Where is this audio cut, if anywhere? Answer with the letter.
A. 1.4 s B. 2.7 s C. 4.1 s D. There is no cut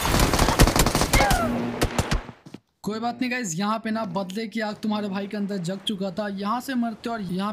B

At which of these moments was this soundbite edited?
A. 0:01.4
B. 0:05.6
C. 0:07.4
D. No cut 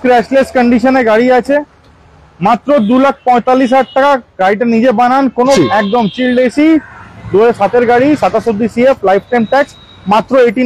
B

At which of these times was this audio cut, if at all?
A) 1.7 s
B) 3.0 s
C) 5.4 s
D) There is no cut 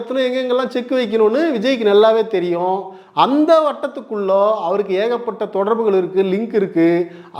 D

